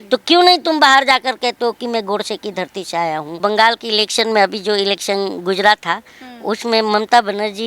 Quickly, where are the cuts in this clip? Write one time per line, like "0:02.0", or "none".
0:03.4